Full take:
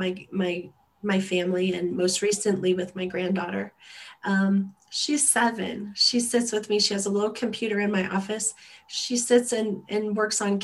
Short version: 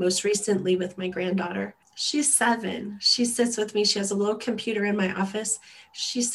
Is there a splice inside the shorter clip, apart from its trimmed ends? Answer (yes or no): yes